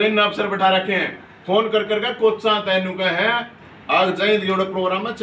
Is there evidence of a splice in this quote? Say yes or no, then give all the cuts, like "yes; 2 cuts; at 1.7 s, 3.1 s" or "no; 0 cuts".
no; 0 cuts